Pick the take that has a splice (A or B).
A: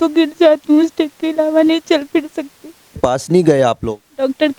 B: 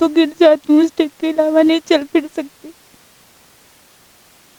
A